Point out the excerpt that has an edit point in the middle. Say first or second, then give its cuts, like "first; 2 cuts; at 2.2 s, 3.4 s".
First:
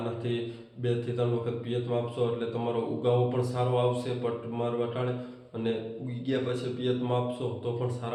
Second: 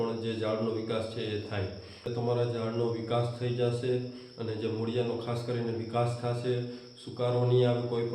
second; 1 cut; at 2.1 s